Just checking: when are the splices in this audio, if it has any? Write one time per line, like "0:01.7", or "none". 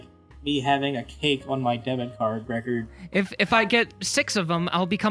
0:02.9